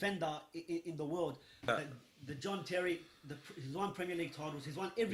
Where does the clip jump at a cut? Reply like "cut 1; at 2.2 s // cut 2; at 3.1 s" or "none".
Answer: cut 1; at 1.7 s